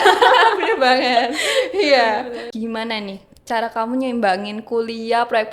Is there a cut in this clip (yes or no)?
yes